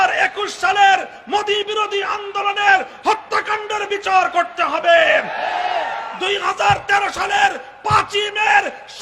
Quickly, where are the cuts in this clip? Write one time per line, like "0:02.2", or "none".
none